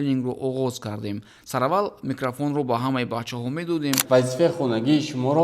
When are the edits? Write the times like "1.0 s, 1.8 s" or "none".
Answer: 4.0 s